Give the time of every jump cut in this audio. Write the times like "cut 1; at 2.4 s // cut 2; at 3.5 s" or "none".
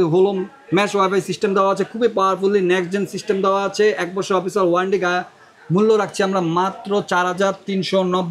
none